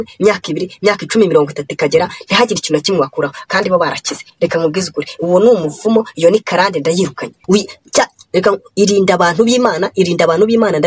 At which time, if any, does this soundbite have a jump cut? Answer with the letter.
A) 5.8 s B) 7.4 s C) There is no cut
B